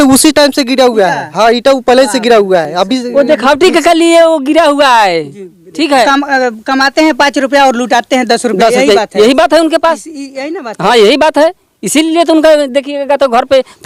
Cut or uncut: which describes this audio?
uncut